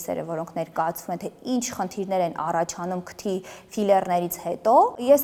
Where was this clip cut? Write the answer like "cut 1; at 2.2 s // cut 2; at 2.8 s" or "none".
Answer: none

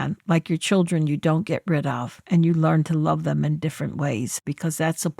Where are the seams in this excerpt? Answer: cut 1; at 2.2 s // cut 2; at 4.4 s

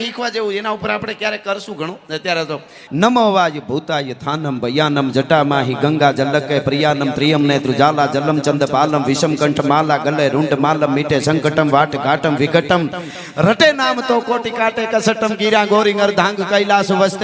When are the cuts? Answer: cut 1; at 2.8 s

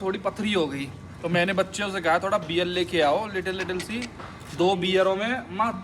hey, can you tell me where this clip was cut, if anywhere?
none

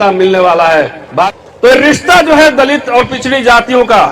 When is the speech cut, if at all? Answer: cut 1; at 1.3 s

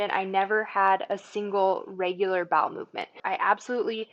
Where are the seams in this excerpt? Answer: cut 1; at 3.2 s

